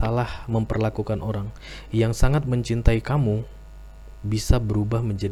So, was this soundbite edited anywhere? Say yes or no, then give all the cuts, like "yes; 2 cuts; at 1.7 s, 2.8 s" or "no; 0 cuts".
no; 0 cuts